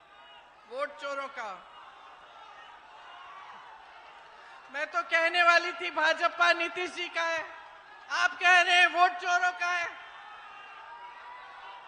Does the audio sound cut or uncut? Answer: uncut